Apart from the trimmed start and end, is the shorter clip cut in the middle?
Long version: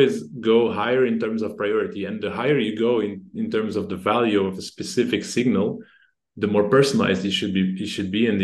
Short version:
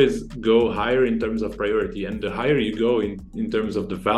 no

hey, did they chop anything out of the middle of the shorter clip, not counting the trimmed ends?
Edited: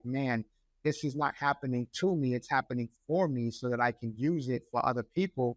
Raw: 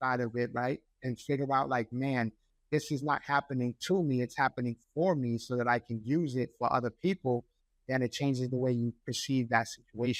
no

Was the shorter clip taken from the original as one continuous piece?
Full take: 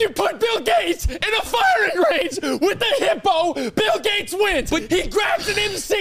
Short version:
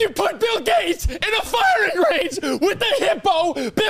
yes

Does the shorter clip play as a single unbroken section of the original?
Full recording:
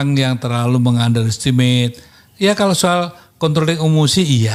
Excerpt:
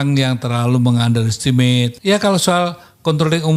no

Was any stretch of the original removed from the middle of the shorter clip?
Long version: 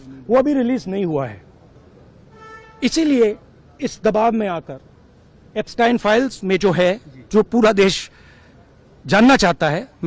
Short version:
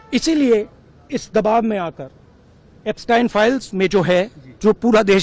no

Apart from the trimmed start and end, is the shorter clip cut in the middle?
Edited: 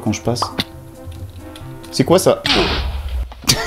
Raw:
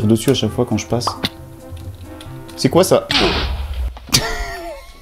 no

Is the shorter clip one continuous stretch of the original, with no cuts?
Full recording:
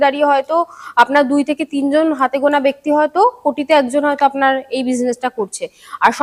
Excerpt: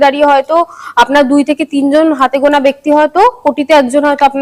yes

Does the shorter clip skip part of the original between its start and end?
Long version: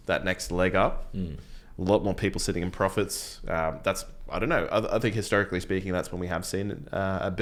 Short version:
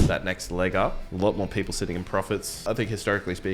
yes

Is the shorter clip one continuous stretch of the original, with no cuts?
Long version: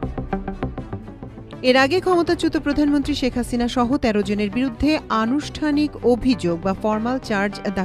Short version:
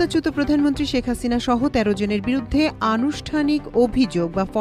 yes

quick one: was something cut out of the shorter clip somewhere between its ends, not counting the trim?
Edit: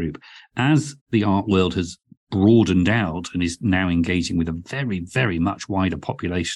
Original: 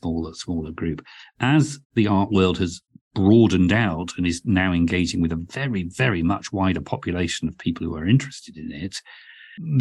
no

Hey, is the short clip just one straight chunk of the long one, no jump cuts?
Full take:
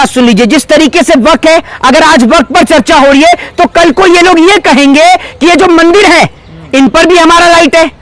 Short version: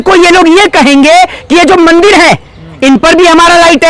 yes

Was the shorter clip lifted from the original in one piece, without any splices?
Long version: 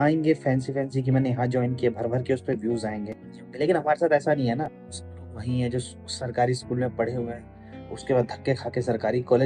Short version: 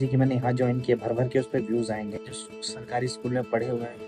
no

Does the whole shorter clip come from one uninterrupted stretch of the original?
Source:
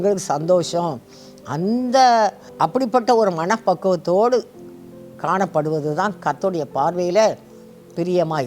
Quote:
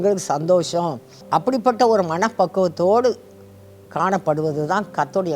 no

